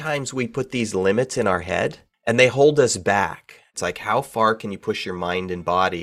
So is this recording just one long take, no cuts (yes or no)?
no